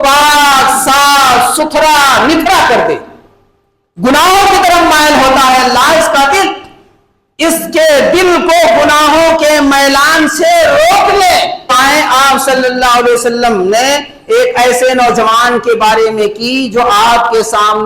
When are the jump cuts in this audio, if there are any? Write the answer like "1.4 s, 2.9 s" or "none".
11.7 s